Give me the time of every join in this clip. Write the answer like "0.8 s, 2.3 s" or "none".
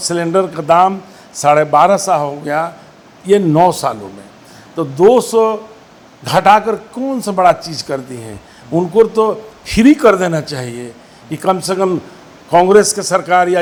none

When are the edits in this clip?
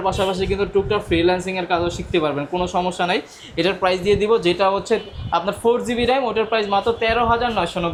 none

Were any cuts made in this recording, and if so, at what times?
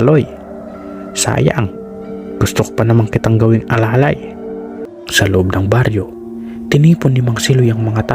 4.8 s

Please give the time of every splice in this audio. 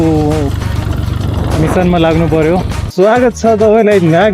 2.9 s

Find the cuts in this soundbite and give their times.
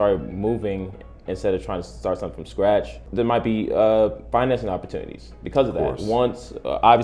3.0 s

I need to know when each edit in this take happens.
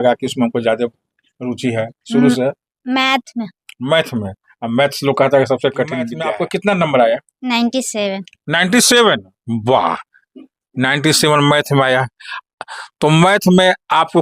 6.2 s

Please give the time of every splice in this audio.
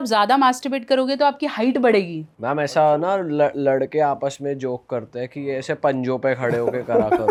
none

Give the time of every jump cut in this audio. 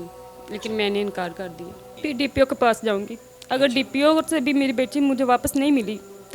1.9 s

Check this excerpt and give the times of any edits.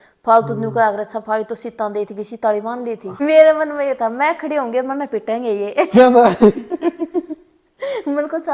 3.1 s

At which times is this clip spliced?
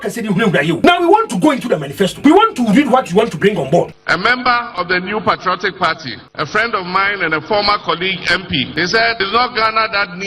0.8 s, 2.1 s, 4.0 s, 6.2 s, 9.2 s

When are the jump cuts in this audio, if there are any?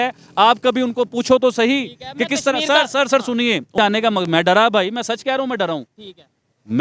3.7 s

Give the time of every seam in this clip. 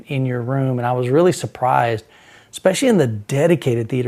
none

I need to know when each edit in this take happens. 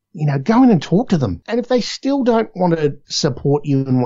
1.4 s, 3.1 s

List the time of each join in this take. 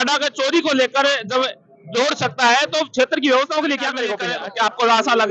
4.2 s

